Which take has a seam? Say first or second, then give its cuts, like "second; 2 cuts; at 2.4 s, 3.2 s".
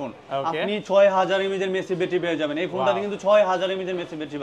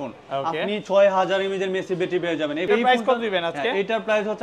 second; 1 cut; at 2.7 s